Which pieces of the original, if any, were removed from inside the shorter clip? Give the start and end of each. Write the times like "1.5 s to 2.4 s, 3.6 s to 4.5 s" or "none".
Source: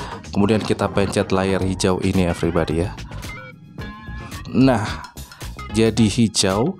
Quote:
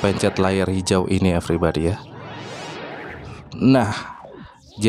none